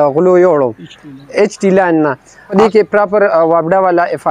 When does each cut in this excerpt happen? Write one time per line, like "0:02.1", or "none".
0:02.5

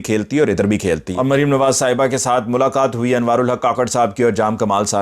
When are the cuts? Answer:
0:01.1

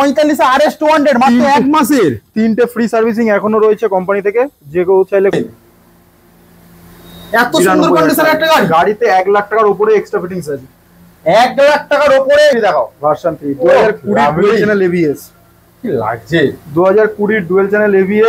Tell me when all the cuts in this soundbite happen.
0:05.3
0:12.5

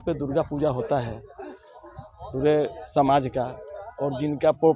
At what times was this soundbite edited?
none

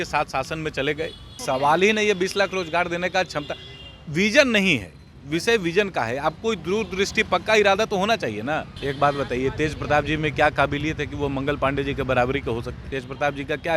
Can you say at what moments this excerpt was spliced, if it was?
0:01.4
0:08.7
0:12.8

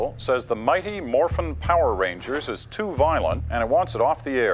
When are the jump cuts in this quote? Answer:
0:03.4

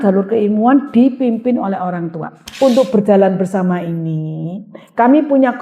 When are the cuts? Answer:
0:02.4

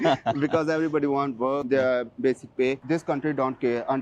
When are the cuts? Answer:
0:02.8

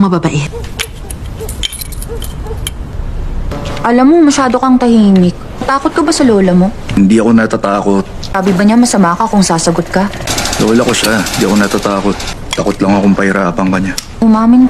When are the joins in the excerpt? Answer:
0:06.5

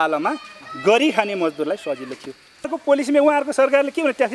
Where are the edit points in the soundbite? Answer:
0:02.7

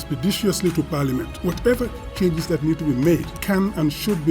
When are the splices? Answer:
0:01.3
0:03.3

